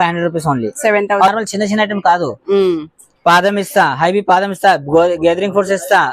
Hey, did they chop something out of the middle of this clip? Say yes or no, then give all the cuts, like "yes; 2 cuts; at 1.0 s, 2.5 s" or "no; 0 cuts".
yes; 1 cut; at 1.3 s